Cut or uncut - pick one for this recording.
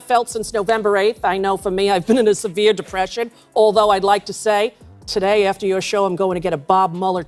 uncut